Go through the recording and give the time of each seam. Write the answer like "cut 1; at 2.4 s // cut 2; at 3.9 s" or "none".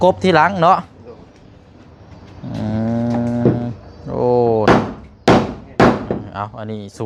none